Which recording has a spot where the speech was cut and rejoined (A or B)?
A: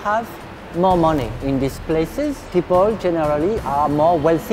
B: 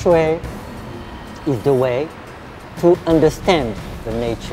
A